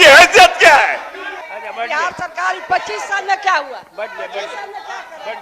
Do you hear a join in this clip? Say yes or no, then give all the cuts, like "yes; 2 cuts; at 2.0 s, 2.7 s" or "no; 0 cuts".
yes; 1 cut; at 1.4 s